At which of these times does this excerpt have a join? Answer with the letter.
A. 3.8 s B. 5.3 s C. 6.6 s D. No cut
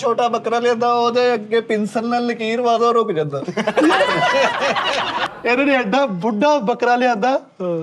B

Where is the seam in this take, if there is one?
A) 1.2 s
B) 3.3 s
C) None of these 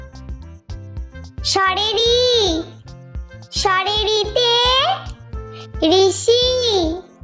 A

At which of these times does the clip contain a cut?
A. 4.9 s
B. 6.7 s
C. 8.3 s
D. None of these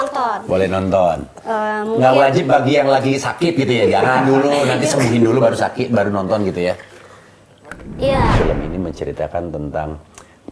C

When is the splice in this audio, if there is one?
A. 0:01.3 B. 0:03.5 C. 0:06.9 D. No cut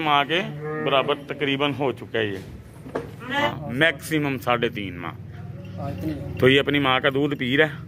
B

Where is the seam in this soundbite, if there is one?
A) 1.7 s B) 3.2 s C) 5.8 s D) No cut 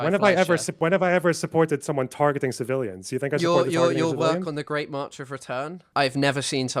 C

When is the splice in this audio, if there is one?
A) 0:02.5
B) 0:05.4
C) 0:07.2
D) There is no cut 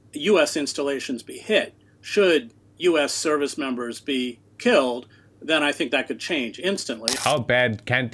C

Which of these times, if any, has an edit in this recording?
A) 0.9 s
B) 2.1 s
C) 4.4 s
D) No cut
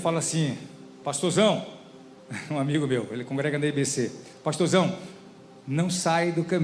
D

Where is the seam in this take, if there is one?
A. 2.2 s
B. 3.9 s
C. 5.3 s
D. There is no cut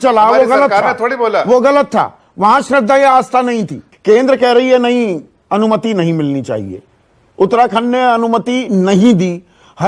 B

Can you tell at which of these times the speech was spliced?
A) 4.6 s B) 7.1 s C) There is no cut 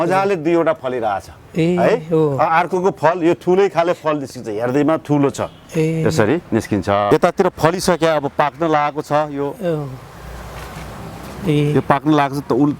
B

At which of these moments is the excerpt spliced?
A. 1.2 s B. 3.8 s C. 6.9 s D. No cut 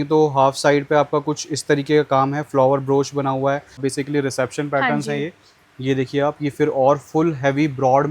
B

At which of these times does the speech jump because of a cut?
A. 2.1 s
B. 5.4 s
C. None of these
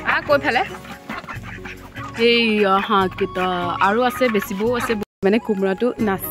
B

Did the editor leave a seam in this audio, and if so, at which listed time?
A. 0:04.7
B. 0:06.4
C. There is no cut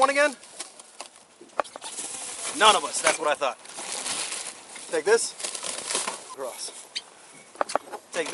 B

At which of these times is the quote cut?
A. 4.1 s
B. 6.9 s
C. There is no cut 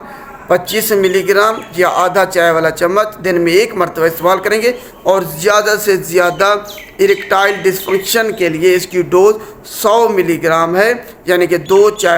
C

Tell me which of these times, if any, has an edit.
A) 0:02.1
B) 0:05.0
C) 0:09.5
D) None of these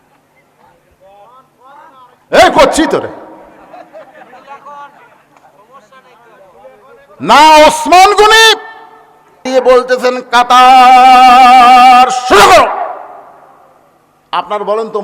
C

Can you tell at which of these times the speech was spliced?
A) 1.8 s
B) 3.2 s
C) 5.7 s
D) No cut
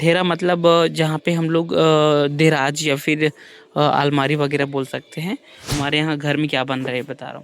C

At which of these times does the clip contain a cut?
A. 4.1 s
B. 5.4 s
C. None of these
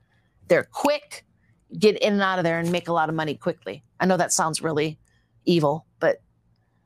C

